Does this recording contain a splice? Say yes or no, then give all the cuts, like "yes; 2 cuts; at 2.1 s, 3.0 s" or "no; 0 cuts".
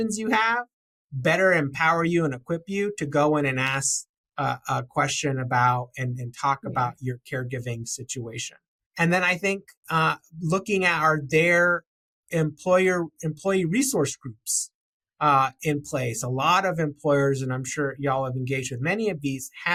no; 0 cuts